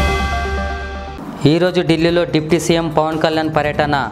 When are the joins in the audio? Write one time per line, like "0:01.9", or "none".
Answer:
0:01.0

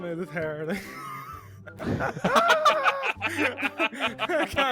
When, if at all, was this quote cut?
none

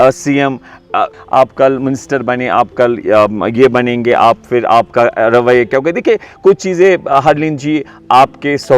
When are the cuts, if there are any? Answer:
0:01.1

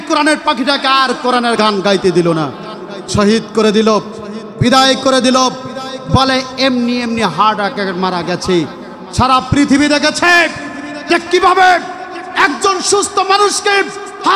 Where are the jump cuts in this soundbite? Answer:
0:01.5

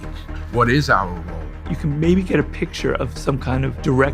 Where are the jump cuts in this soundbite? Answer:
0:01.7

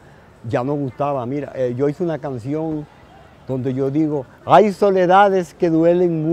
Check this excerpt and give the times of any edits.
none

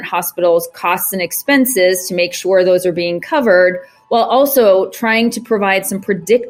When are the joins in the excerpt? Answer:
none

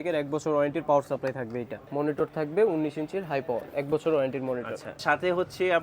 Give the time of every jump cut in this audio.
0:01.8
0:05.0

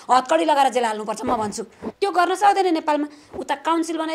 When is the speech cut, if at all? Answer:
none

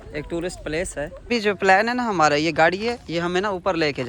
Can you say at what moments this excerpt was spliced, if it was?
0:01.3

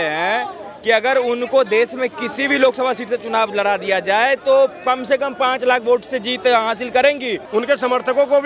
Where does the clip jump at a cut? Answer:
0:07.4

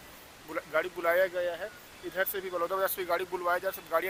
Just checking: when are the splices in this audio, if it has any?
none

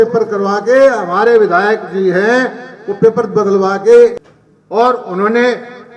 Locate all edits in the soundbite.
0:04.3

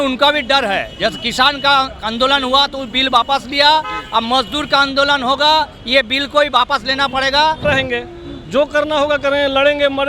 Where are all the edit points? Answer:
0:07.6

